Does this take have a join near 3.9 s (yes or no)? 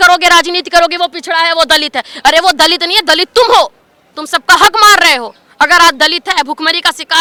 no